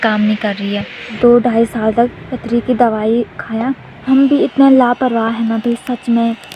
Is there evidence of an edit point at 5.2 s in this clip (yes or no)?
no